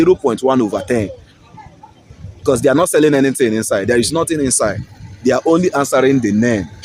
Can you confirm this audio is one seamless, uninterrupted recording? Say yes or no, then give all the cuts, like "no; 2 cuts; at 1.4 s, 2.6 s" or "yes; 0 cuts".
yes; 0 cuts